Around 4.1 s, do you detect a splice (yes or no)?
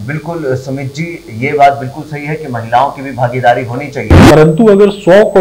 yes